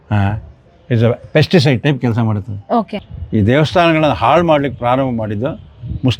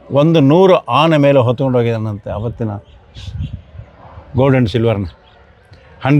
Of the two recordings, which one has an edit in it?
first; 1 cut; at 3.1 s

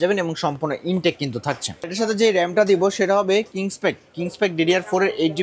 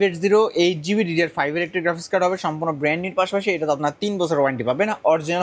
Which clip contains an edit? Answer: first; 1 cut; at 1.9 s

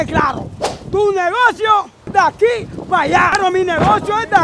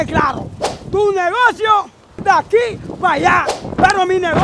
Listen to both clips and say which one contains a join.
first; 2 cuts; at 2.0 s, 3.3 s

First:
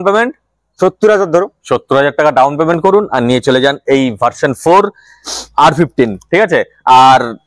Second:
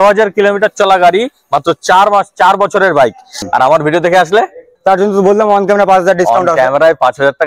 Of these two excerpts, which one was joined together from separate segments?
second; 1 cut; at 3.3 s

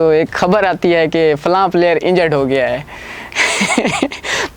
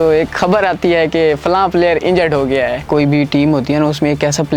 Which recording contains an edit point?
second; 1 cut; at 2.9 s

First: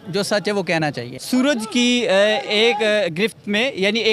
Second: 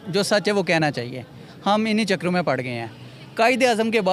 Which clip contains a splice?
first; 1 cut; at 1.1 s

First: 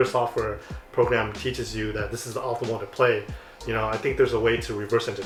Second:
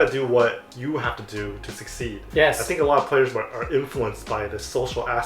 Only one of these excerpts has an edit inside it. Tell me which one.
second; 1 cut; at 2.2 s

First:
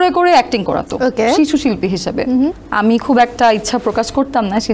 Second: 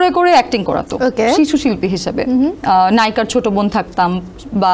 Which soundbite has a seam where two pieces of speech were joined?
first; 1 cut; at 2.6 s

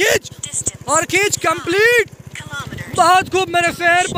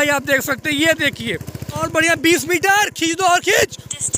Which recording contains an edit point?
second; 1 cut; at 1.8 s

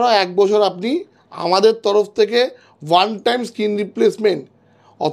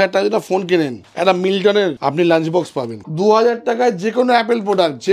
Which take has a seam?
second; 3 cuts; at 1.0 s, 2.0 s, 3.0 s

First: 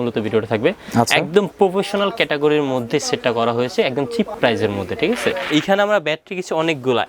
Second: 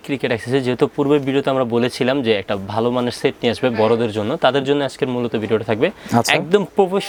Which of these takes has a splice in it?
first; 2 cuts; at 4.3 s, 5.4 s

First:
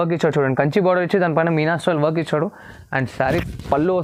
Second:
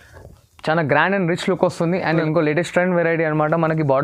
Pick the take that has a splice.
second; 1 cut; at 2.2 s

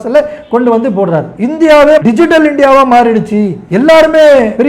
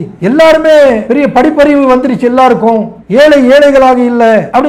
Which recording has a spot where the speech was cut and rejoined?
first; 2 cuts; at 1.3 s, 2.0 s

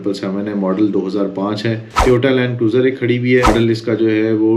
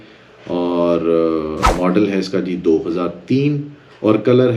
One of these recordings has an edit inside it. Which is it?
first; 2 cuts; at 1.9 s, 3.5 s

